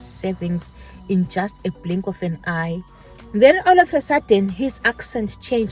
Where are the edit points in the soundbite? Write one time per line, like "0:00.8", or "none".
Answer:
0:02.8